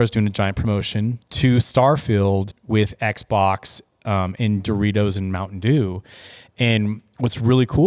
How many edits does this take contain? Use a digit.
2